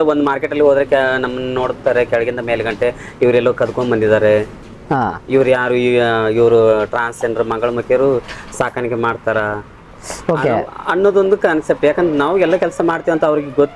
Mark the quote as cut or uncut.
uncut